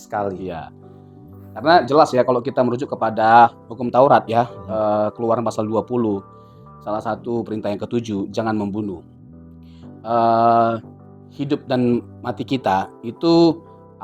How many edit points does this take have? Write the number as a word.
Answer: zero